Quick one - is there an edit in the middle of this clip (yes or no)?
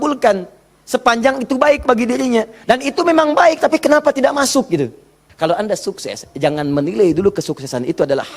yes